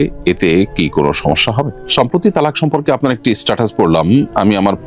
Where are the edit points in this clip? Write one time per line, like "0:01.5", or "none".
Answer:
0:01.7